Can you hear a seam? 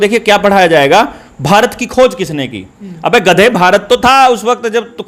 no; 0 cuts

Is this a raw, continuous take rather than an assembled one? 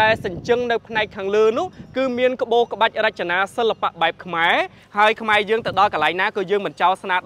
no; 1 cut; at 4.8 s

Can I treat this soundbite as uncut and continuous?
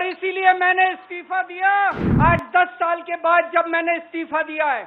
no; 1 cut; at 2.1 s

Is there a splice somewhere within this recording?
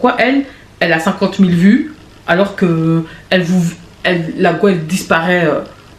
no; 0 cuts

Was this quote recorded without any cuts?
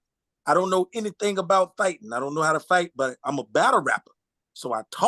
yes; 0 cuts

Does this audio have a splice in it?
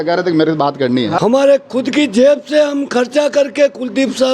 yes; 1 cut; at 1.1 s

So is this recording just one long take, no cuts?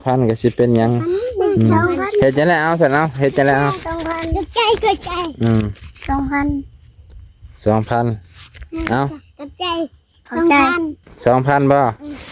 yes; 0 cuts

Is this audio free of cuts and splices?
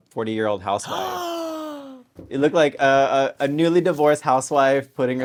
yes; 0 cuts

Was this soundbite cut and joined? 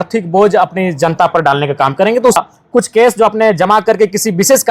yes; 1 cut; at 2.4 s

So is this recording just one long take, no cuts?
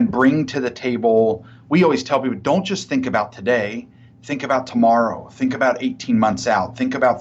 yes; 0 cuts

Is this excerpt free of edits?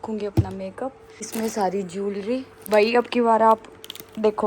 no; 2 cuts; at 1.1 s, 2.6 s

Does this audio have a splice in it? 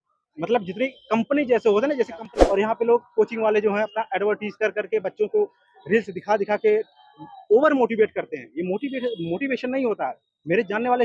yes; 1 cut; at 2.3 s

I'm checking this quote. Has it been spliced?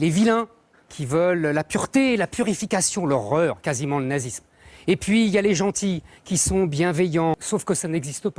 yes; 1 cut; at 7.4 s

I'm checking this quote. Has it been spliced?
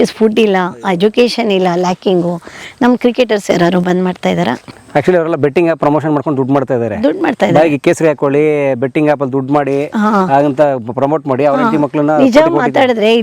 no; 0 cuts

